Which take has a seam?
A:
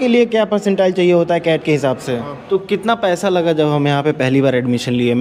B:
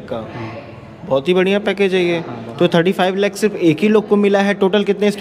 A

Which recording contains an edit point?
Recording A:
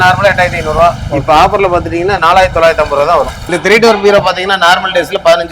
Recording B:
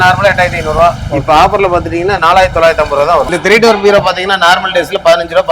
B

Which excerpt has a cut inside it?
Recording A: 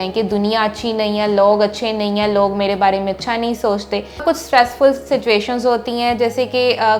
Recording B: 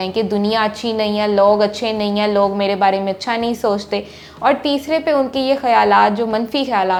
A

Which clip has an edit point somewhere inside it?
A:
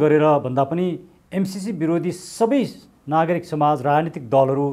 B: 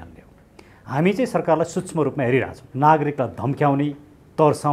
B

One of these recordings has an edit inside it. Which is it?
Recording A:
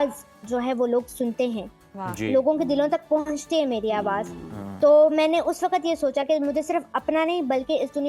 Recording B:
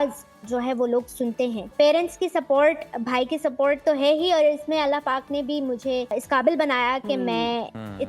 B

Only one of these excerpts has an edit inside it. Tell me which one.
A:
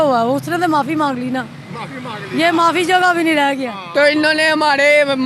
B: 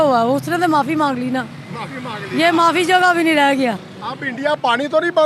A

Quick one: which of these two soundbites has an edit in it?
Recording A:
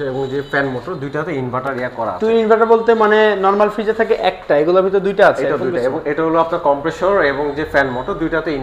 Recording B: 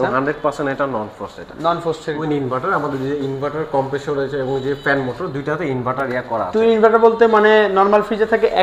B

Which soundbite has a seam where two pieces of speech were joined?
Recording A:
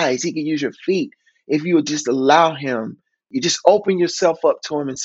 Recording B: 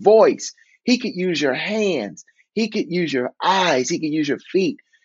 A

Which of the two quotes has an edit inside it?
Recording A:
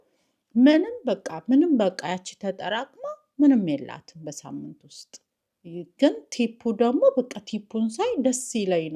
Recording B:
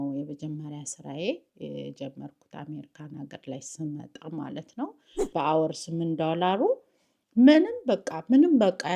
B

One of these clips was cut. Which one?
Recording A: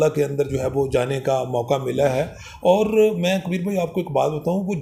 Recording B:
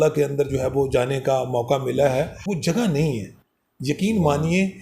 B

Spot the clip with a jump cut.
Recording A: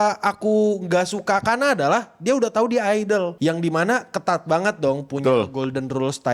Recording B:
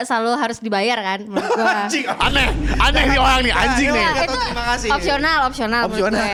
A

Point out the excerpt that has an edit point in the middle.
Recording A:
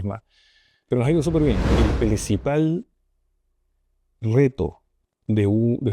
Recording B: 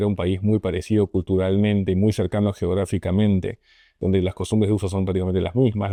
A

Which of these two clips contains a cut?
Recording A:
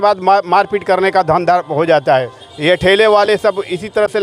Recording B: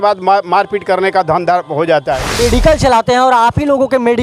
B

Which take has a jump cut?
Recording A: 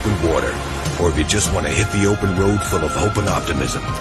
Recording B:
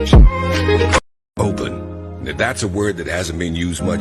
B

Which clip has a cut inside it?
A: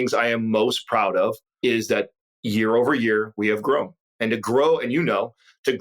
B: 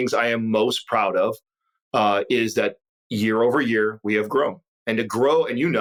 A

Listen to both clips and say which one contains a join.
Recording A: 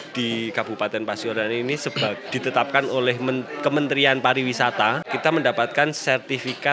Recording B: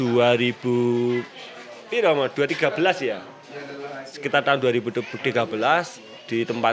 A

